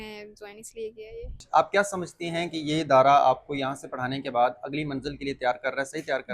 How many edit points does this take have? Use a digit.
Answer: 1